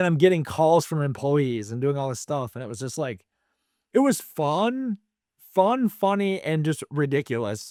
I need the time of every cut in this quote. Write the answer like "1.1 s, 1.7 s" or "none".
none